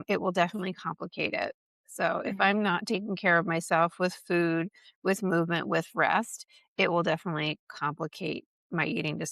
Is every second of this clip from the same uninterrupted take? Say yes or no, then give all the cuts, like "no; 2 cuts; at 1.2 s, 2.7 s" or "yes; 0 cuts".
yes; 0 cuts